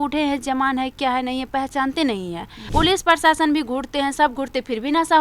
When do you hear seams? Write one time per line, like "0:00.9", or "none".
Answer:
0:02.5